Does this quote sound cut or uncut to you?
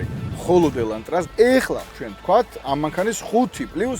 cut